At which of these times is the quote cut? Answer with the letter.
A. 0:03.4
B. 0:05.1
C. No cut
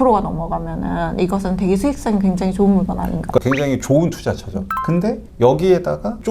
A